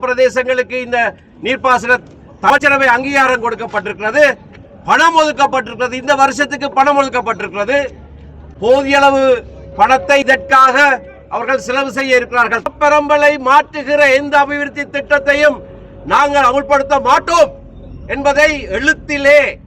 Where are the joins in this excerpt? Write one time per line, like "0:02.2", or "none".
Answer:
0:02.5
0:12.7